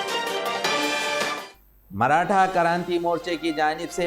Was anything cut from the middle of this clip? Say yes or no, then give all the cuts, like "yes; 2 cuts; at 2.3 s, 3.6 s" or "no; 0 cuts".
yes; 1 cut; at 1.6 s